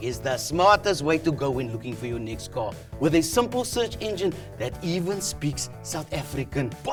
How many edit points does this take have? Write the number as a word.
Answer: zero